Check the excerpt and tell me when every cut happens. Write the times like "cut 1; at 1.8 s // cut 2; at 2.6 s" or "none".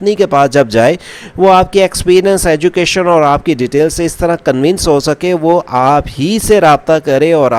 none

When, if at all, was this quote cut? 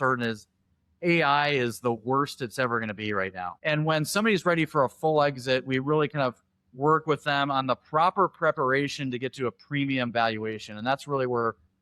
cut 1; at 3.5 s

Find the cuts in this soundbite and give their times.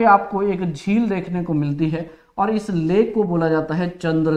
none

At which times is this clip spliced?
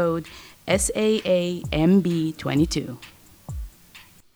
cut 1; at 3.4 s

